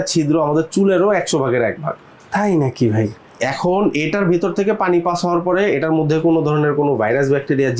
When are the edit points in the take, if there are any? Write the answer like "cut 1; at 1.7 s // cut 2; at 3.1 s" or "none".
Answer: none